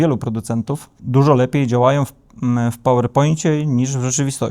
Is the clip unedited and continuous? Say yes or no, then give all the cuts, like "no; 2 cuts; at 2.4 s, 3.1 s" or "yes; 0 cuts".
no; 1 cut; at 1.0 s